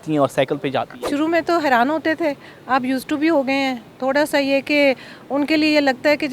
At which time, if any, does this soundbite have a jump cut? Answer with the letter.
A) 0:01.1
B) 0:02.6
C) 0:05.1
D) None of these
A